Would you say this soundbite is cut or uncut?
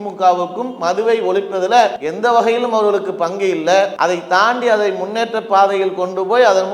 cut